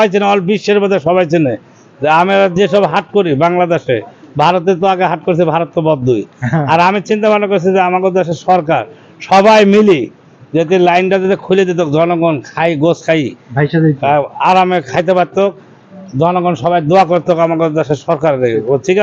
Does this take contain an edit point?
no; 0 cuts

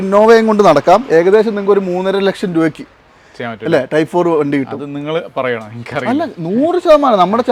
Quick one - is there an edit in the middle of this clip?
no; 0 cuts

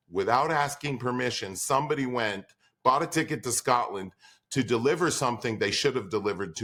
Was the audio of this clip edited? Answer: no; 0 cuts

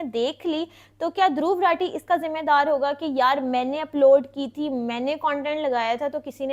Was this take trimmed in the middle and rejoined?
no; 0 cuts

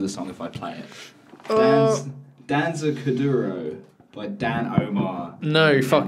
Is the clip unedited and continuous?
yes; 0 cuts

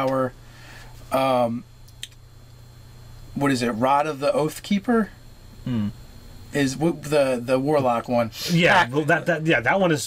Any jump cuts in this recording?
yes; 1 cut; at 3.6 s

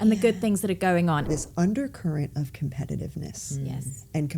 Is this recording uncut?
no; 1 cut; at 1.2 s

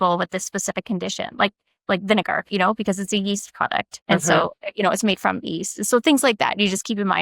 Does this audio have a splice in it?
yes; 1 cut; at 4.3 s

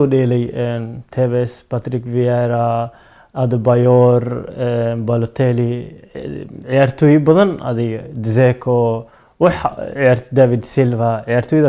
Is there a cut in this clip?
no; 0 cuts

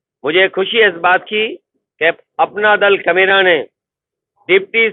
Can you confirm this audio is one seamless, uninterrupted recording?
yes; 0 cuts

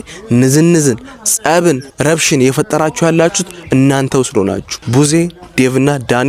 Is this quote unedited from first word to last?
no; 2 cuts; at 1.9 s, 4.7 s

